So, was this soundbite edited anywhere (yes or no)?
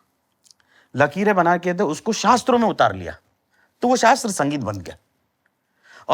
no